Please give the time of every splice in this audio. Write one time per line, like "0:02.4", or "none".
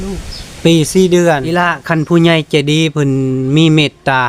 0:01.6